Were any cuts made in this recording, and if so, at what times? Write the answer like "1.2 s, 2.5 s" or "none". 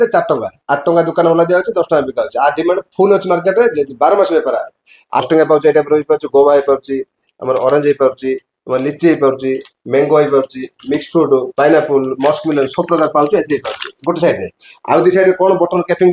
5.2 s